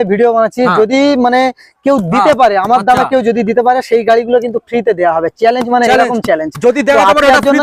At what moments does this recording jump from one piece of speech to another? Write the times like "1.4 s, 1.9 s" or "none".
none